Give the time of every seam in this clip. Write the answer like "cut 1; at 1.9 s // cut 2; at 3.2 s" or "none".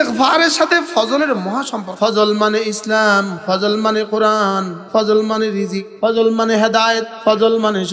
cut 1; at 1.8 s // cut 2; at 3.4 s // cut 3; at 4.8 s // cut 4; at 5.8 s // cut 5; at 7.1 s

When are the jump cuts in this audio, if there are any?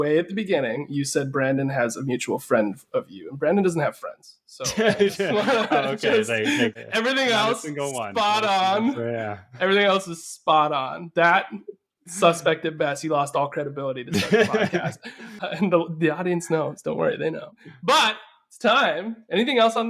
cut 1; at 6.8 s

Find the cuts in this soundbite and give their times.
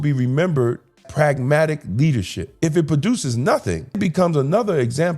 cut 1; at 1.0 s // cut 2; at 2.4 s // cut 3; at 4.0 s

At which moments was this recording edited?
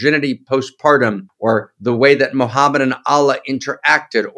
cut 1; at 1.3 s

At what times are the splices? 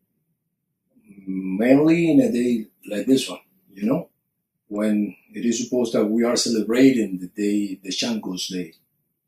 cut 1; at 2.8 s

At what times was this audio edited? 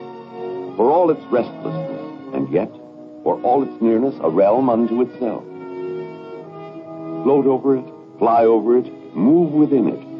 cut 1; at 1.5 s

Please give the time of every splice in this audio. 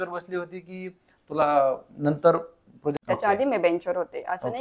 cut 1; at 2.9 s

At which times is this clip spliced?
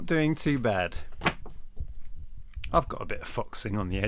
none

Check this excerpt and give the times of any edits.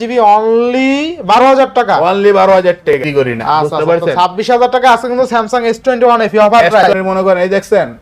cut 1; at 3.0 s // cut 2; at 6.8 s

